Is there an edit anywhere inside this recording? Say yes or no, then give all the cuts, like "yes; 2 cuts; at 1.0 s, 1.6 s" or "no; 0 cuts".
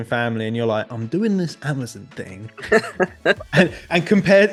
no; 0 cuts